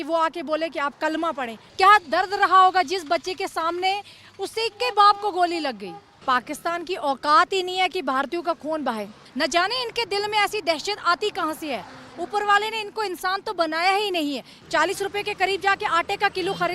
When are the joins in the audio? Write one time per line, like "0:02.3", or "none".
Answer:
0:01.6
0:06.2
0:09.2
0:14.6